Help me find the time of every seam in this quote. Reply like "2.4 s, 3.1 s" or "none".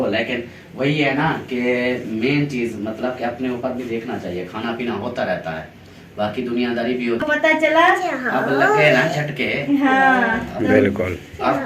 7.2 s